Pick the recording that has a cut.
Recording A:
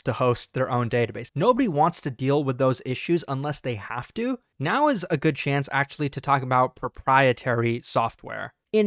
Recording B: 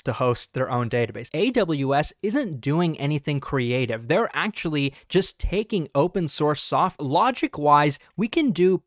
B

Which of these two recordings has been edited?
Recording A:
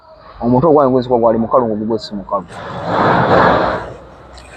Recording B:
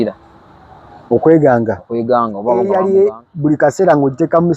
B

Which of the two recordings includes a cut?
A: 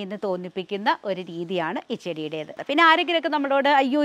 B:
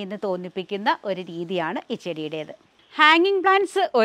A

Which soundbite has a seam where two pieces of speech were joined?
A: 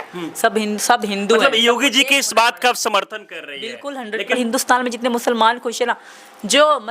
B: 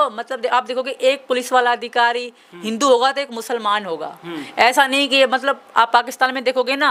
A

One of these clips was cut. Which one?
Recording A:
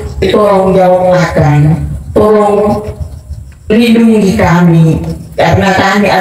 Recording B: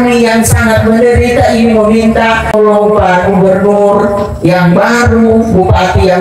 B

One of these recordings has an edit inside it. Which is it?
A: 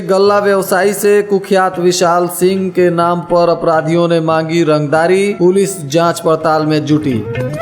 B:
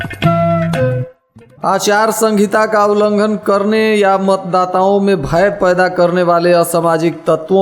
B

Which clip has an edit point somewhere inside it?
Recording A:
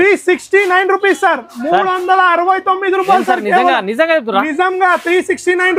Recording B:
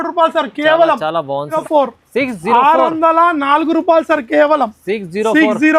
B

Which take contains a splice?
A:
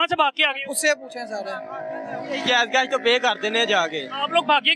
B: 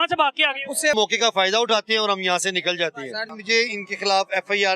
B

